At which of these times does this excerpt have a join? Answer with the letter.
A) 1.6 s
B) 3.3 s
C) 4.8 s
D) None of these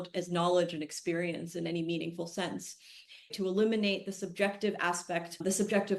B